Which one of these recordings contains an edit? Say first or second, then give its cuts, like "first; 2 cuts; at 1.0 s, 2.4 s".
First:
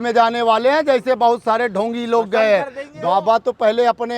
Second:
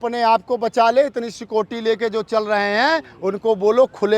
first; 1 cut; at 2.8 s